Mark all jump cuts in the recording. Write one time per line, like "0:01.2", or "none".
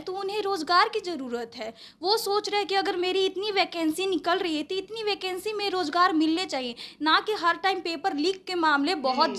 none